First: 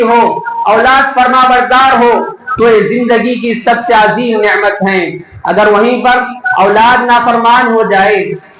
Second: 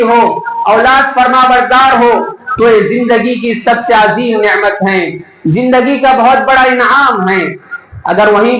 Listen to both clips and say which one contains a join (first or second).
first